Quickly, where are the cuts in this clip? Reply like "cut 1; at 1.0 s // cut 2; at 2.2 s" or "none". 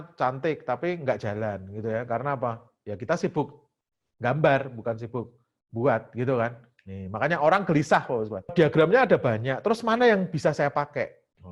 none